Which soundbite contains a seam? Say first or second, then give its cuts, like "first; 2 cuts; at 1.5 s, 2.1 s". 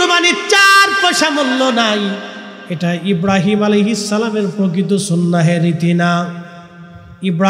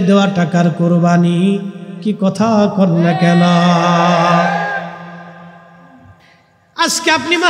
second; 1 cut; at 6.3 s